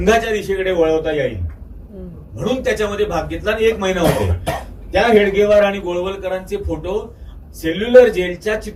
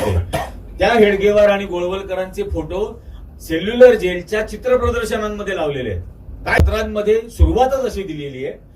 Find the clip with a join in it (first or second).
second